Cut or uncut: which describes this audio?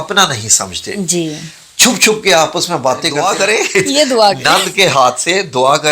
cut